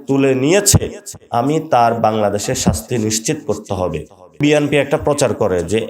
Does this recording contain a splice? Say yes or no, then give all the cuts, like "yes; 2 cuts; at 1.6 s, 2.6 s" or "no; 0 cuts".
yes; 1 cut; at 4.4 s